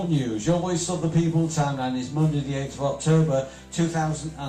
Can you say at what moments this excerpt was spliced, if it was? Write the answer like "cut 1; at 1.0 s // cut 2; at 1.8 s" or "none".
none